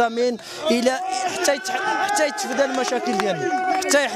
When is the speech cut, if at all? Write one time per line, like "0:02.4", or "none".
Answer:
none